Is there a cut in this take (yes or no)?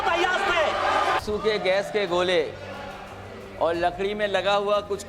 yes